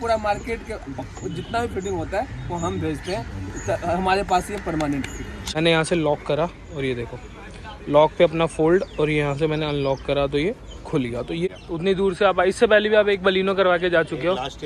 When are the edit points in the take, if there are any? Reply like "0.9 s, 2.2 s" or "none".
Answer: 5.3 s, 11.5 s